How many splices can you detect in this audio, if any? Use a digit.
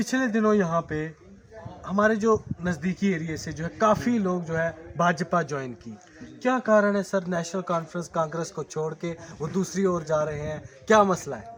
0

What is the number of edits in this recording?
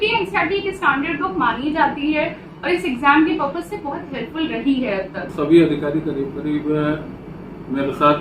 1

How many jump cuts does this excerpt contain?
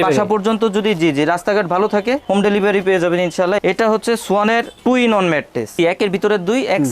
2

